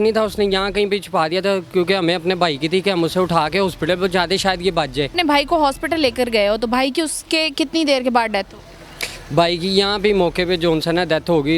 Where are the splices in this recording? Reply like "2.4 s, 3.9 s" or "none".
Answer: 5.1 s